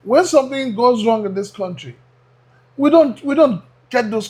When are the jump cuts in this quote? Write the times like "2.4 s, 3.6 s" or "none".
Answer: none